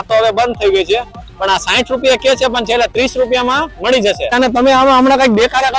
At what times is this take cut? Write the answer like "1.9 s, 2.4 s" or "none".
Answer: 4.3 s